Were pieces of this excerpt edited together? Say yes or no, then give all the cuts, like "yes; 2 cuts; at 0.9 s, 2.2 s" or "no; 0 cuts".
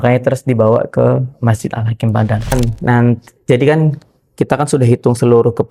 yes; 1 cut; at 2.5 s